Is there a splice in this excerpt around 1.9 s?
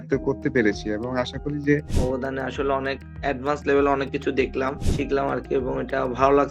yes; 1 cut; at 1.9 s

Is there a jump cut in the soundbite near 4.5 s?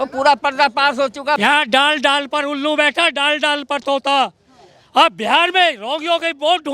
no; 1 cut; at 1.4 s

